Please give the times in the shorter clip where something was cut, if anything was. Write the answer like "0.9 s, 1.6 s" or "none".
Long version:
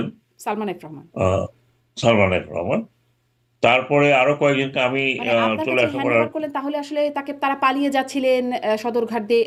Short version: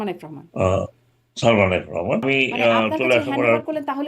2.2 s

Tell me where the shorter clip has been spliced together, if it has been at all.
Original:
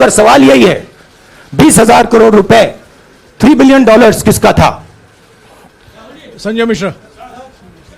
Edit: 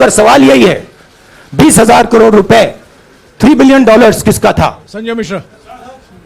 4.8 s

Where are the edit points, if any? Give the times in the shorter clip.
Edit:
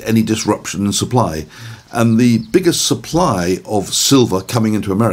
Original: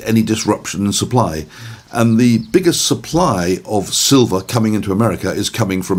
none

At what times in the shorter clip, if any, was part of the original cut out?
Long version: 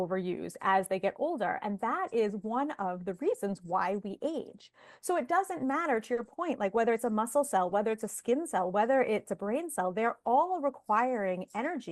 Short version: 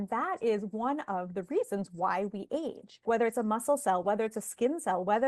3.0 s

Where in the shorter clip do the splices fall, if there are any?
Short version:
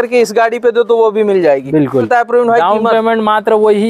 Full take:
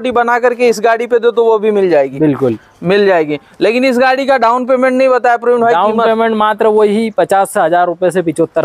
2.1 s

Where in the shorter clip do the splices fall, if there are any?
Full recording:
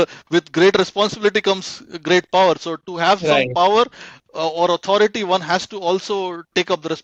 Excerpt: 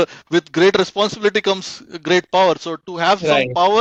none

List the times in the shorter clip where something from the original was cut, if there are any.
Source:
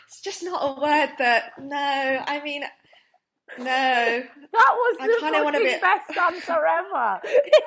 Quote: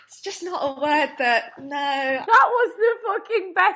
2.2 s

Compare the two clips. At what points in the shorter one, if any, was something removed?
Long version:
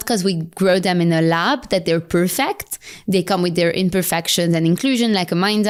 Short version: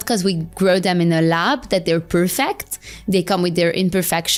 none

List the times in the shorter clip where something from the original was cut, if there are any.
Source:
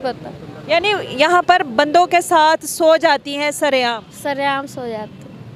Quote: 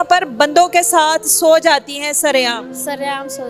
none

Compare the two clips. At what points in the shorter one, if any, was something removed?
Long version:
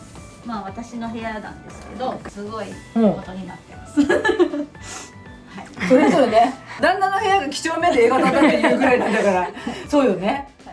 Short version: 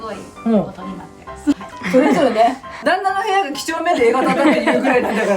1.6 s

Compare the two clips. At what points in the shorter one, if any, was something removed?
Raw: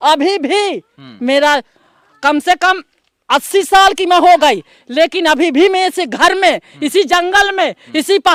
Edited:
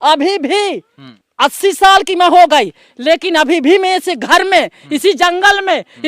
1.0 s

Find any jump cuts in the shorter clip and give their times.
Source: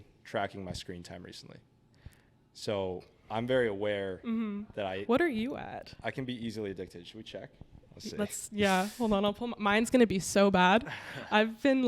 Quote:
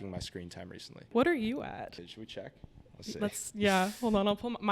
1.1 s, 2.0 s

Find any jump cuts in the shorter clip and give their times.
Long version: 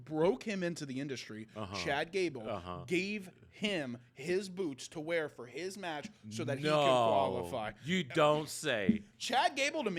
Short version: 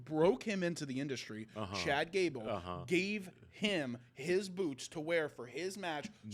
none

